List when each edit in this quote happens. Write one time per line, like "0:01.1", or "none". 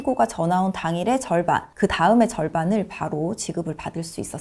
none